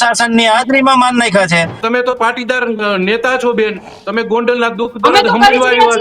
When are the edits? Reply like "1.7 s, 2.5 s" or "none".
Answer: 1.8 s